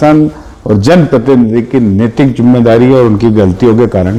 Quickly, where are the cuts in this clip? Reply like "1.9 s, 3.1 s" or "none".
none